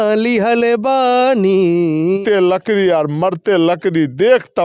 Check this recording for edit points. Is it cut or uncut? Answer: cut